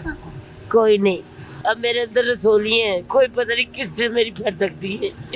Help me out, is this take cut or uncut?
cut